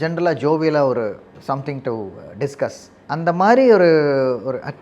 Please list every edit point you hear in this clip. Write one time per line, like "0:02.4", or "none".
0:01.3
0:02.9